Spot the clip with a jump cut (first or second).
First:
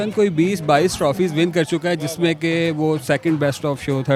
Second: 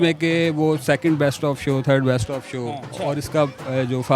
second